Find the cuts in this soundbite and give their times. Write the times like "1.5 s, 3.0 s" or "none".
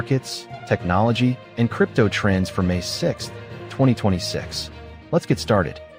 none